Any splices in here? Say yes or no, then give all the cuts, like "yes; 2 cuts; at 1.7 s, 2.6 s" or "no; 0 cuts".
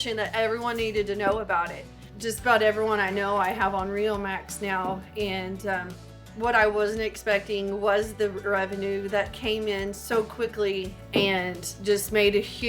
no; 0 cuts